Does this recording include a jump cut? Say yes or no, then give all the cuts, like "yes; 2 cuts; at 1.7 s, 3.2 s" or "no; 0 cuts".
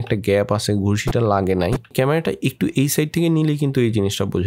no; 0 cuts